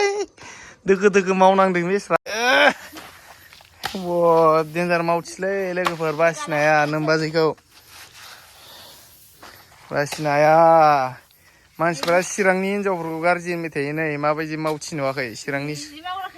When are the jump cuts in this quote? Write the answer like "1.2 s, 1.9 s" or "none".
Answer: 2.2 s

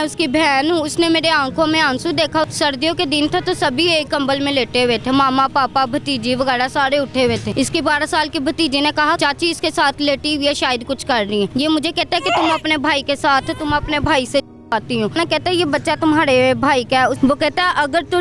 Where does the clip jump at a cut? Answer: 2.5 s, 7.5 s, 9.2 s, 11.5 s, 15.2 s, 17.2 s

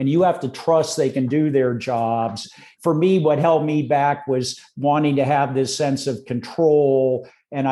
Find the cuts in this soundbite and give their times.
2.7 s

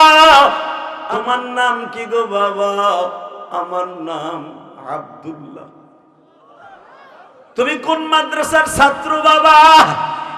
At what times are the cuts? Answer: 0.9 s

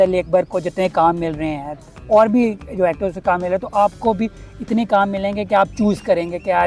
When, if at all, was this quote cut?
none

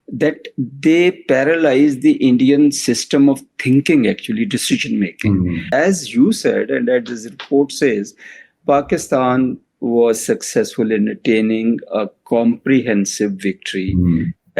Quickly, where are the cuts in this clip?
5.7 s

